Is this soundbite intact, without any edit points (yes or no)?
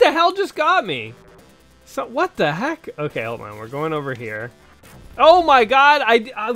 yes